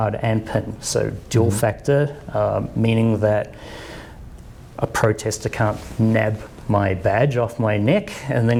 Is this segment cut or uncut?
uncut